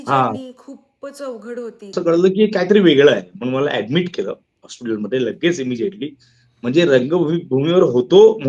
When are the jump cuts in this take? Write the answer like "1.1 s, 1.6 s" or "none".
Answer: 1.8 s

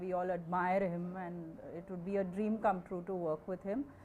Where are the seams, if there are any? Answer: none

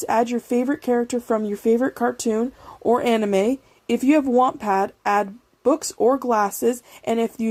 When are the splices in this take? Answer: none

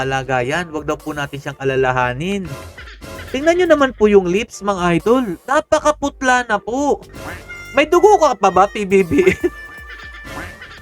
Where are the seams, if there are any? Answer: none

